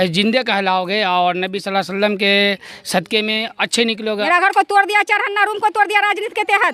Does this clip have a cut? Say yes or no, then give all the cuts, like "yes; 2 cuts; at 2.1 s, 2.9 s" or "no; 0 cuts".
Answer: yes; 1 cut; at 4.2 s